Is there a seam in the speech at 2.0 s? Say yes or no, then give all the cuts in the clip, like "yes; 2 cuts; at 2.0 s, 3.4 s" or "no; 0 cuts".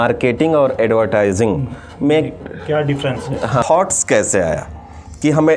no; 1 cut; at 3.6 s